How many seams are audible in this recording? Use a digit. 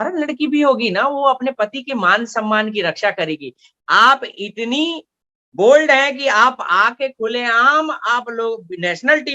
1